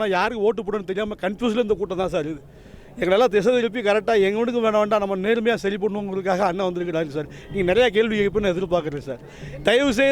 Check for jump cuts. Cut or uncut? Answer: uncut